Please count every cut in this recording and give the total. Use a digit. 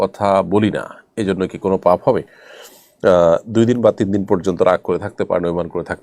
0